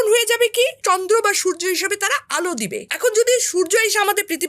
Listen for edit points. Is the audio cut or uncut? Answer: cut